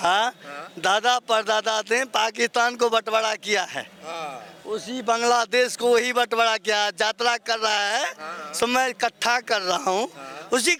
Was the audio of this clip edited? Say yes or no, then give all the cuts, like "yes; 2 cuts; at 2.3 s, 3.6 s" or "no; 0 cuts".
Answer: no; 0 cuts